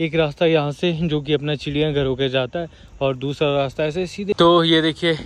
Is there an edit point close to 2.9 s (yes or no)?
no